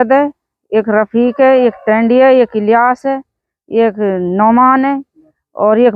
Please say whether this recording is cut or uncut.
uncut